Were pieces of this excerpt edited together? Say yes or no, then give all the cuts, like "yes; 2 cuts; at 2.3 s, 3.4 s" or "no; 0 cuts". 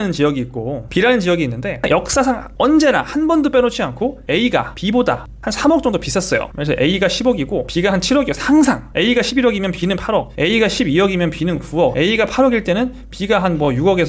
yes; 1 cut; at 1.8 s